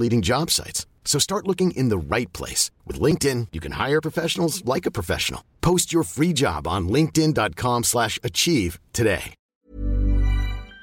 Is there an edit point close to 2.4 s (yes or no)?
no